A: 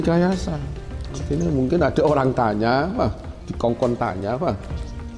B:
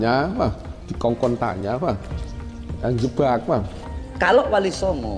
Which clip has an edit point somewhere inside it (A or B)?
B